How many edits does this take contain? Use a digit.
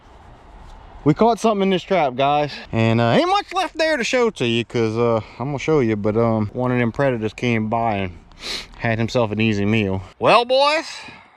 3